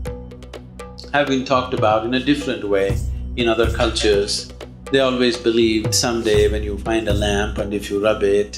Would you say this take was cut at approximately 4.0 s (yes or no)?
no